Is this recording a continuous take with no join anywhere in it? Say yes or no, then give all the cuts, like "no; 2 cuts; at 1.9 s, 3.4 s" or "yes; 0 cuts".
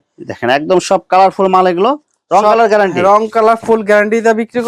yes; 0 cuts